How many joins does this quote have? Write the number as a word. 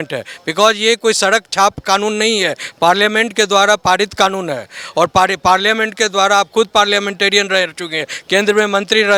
zero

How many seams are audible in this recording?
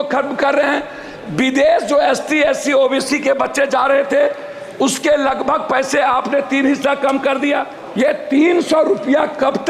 one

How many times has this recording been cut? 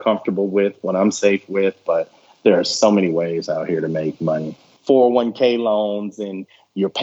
one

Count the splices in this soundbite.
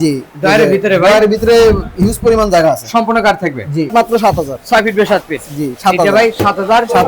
one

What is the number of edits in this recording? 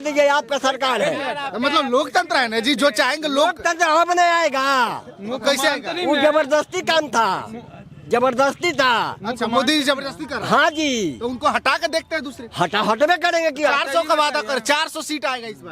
zero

